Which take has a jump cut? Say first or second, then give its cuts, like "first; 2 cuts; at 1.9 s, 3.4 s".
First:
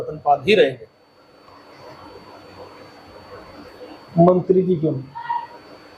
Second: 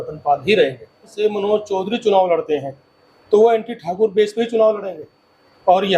second; 1 cut; at 1.1 s